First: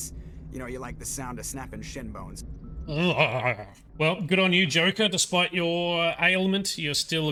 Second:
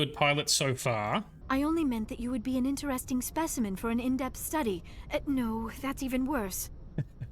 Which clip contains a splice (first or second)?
second